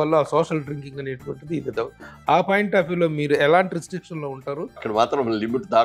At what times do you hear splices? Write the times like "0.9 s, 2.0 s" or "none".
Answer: 4.8 s